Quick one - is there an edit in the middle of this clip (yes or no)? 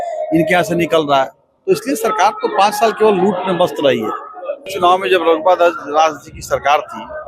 yes